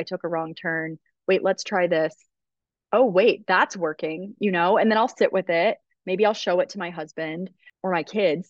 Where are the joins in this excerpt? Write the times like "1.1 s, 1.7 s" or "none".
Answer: none